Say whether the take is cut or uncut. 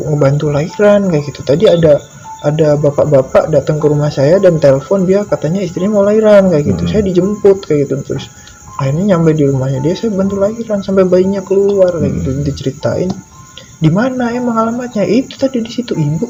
uncut